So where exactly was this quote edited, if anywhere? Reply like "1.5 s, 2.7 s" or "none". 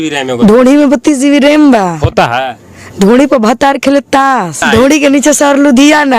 4.6 s